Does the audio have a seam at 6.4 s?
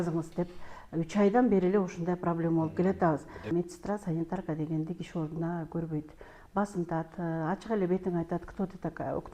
no; 1 cut; at 3.5 s

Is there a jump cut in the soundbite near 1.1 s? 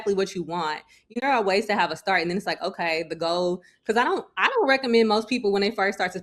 yes; 1 cut; at 1.1 s

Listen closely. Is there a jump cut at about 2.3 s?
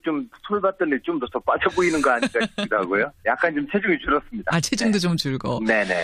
no; 0 cuts

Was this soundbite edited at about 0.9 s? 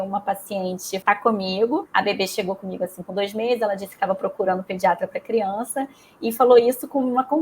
yes; 2 cuts; at 0.9 s, 1.9 s

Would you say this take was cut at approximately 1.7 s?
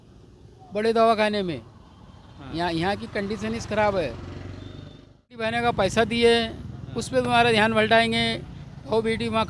no; 1 cut; at 5.5 s

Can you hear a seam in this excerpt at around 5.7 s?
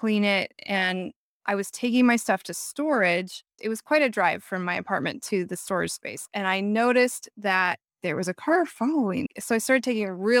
no; 0 cuts

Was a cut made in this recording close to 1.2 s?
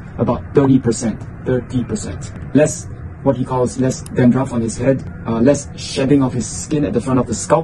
no; 0 cuts

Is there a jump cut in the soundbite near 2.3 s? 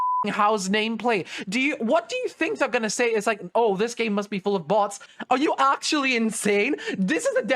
no; 1 cut; at 5.1 s

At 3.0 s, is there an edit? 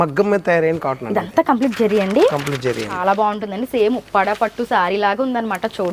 yes; 1 cut; at 3.0 s

